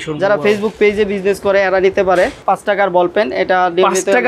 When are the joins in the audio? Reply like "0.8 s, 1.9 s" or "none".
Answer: 2.4 s